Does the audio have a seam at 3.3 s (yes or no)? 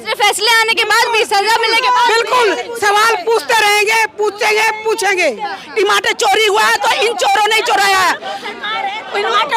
no